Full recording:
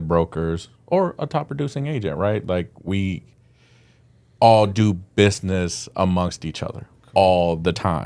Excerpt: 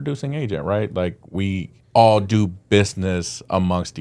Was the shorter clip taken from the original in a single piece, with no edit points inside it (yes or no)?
no